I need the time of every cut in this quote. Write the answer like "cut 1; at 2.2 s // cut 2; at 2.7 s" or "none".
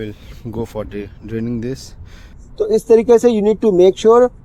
none